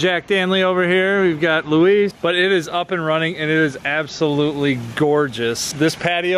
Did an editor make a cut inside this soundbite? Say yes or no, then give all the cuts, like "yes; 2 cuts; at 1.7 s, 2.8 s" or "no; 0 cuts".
yes; 1 cut; at 2.2 s